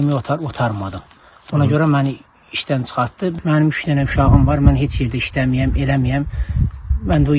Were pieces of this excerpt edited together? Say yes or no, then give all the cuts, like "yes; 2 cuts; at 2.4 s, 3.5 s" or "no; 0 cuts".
yes; 1 cut; at 3.4 s